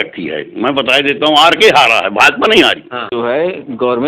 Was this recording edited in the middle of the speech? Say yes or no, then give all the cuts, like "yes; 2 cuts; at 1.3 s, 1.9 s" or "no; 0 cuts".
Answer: yes; 1 cut; at 3.0 s